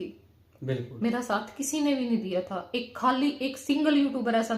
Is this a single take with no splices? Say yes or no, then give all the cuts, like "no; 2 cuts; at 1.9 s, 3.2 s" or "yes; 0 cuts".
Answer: yes; 0 cuts